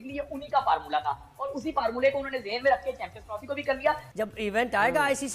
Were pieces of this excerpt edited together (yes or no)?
yes